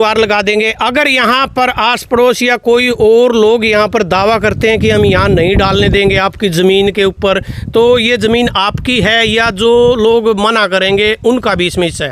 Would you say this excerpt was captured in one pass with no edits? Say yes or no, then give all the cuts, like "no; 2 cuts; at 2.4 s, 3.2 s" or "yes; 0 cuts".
yes; 0 cuts